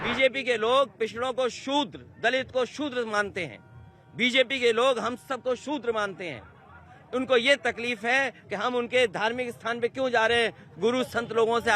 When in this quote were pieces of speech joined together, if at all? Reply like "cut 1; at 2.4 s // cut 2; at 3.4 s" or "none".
none